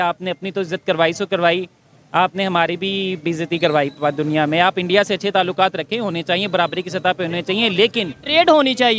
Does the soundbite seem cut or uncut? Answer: uncut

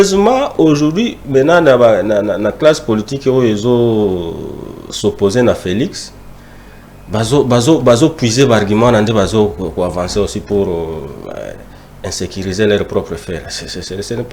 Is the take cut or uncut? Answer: uncut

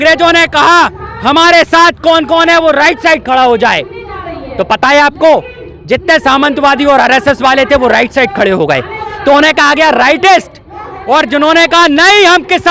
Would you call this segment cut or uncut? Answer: uncut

